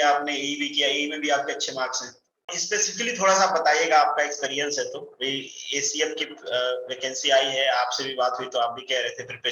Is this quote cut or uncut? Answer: cut